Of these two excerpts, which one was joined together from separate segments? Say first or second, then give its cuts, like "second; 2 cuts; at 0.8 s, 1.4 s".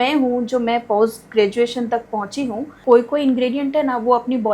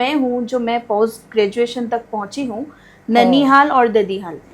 first; 1 cut; at 2.7 s